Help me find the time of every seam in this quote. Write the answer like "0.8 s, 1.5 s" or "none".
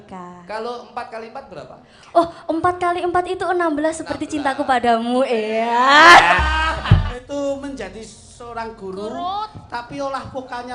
7.2 s